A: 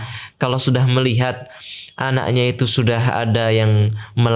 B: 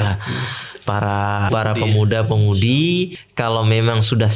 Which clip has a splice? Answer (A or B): B